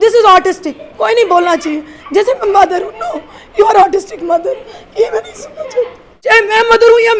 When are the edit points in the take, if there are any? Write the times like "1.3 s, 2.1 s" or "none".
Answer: 6.1 s